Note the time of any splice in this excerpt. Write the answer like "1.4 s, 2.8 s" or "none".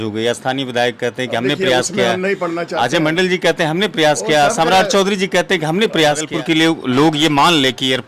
6.3 s